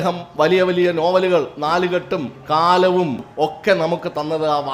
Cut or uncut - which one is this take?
cut